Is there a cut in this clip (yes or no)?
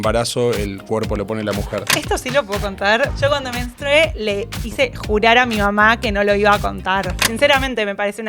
yes